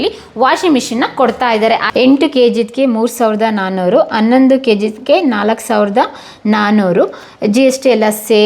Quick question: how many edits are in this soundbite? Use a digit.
1